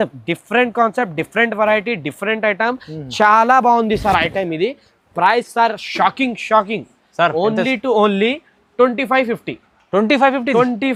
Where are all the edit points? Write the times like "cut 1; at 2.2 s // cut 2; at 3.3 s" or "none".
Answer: none